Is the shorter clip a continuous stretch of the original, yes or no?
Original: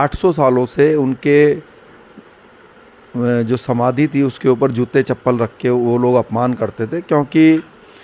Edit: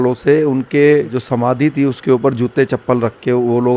no